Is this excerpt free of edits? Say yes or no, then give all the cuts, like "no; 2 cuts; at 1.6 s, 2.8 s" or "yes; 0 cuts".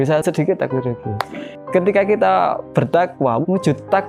yes; 0 cuts